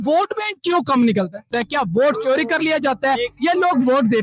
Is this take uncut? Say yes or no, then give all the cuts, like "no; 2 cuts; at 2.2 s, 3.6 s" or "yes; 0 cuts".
no; 1 cut; at 1.5 s